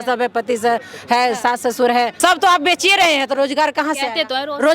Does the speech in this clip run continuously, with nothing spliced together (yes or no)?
no